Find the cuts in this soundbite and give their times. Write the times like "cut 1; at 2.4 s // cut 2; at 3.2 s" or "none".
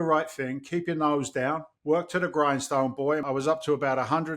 cut 1; at 1.7 s // cut 2; at 3.2 s